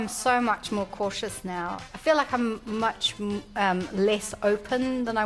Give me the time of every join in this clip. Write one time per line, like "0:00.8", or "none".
0:01.8